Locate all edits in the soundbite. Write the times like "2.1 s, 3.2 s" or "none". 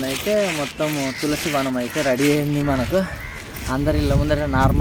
none